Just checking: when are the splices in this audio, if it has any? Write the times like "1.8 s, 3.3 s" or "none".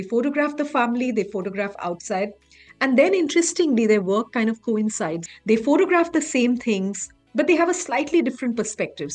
5.2 s